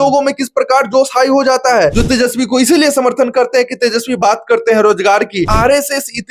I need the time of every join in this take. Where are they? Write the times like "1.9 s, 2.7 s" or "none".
2.0 s, 5.5 s

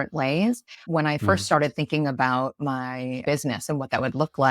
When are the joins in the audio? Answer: 3.2 s

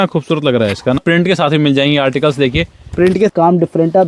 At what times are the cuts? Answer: 1.0 s, 3.3 s

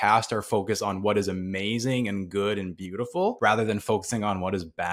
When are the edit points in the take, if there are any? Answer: 3.4 s

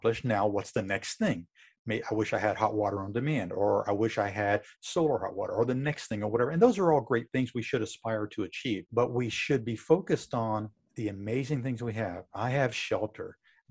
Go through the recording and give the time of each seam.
8.9 s

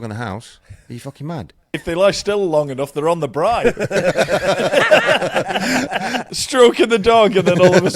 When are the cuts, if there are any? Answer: 1.7 s, 6.3 s

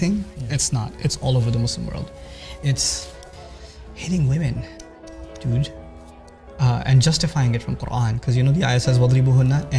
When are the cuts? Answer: none

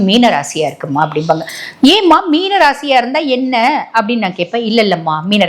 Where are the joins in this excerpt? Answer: none

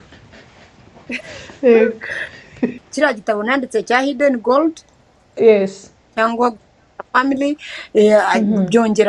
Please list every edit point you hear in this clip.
2.7 s

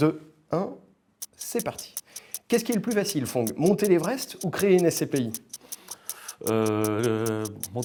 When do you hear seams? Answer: none

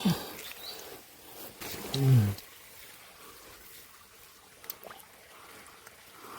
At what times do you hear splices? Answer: 1.6 s

